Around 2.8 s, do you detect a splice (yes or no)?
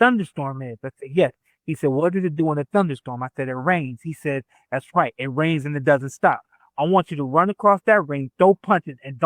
no